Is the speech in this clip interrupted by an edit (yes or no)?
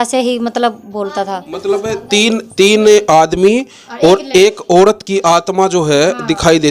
no